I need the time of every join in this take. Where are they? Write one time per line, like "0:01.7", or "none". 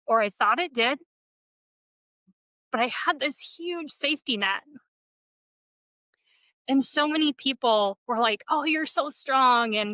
none